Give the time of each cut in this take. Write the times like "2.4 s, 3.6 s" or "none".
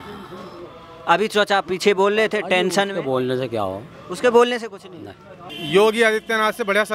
5.5 s

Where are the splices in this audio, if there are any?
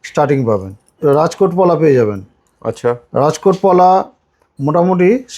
1.0 s

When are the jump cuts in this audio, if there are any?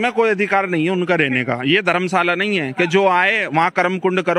none

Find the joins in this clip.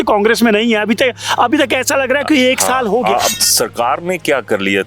3.3 s

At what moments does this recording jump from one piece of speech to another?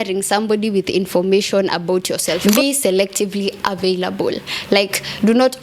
2.4 s

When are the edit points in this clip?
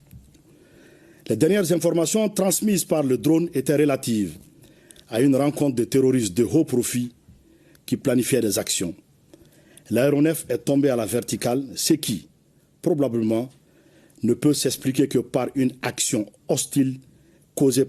none

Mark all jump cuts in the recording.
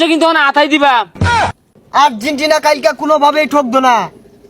1.5 s

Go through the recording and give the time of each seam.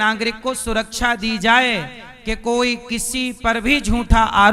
none

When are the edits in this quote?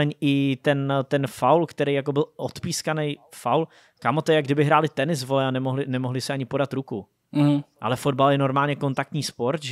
none

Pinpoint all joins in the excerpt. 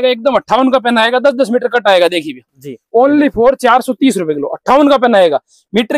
none

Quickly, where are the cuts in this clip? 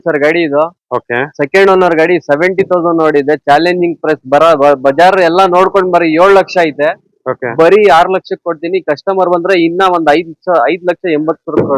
none

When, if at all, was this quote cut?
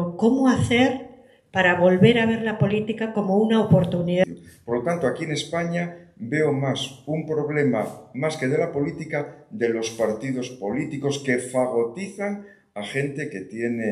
4.2 s

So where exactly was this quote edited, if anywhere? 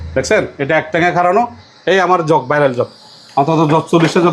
1.6 s

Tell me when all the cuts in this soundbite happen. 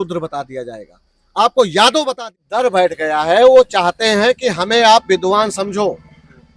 2.4 s

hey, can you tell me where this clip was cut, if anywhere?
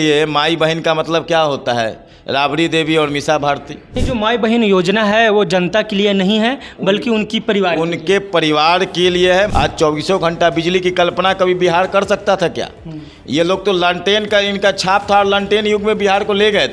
4.0 s, 9.5 s

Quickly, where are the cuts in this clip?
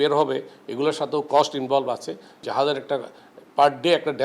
2.4 s

